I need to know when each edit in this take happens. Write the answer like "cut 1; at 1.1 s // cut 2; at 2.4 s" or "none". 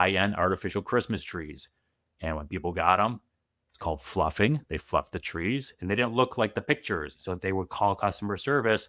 cut 1; at 7.2 s